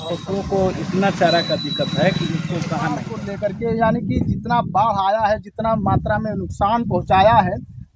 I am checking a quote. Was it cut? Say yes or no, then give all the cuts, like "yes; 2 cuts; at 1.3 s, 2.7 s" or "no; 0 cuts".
yes; 1 cut; at 3.1 s